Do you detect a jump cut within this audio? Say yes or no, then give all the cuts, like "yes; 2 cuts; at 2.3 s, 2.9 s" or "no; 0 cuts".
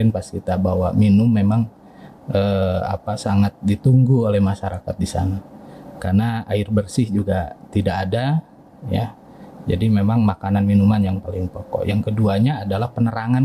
no; 0 cuts